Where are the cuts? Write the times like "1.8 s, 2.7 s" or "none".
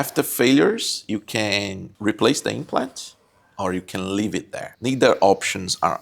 1.8 s, 4.7 s